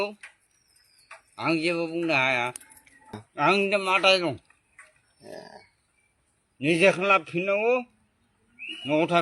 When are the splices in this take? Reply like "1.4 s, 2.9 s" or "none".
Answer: 3.2 s